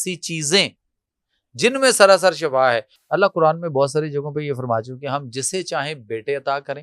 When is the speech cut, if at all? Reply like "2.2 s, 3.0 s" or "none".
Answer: 2.9 s